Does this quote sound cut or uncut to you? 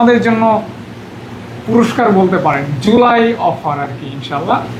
uncut